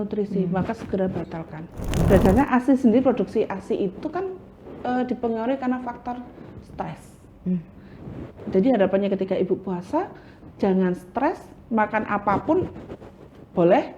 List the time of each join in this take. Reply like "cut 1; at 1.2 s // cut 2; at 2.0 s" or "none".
cut 1; at 2.1 s